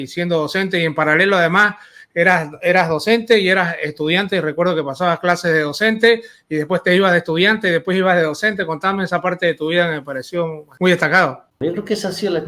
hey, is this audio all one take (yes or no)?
no